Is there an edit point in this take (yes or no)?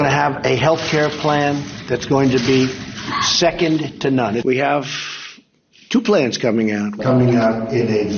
no